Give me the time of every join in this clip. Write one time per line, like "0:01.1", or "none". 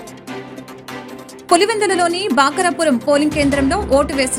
none